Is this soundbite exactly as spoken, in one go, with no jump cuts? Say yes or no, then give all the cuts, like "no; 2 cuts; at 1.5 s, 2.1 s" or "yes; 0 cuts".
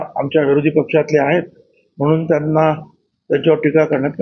yes; 0 cuts